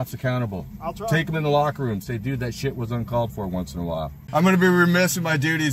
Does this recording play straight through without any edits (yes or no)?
no